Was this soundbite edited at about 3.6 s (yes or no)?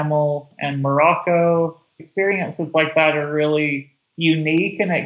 no